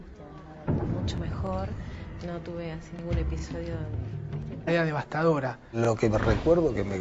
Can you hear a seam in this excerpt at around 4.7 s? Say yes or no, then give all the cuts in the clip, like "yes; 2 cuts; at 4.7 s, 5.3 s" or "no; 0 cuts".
no; 0 cuts